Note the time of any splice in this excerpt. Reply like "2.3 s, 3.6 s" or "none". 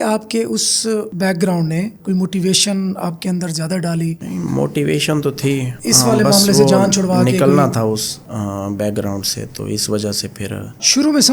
none